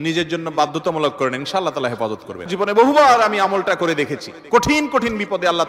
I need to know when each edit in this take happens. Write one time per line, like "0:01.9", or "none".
0:02.5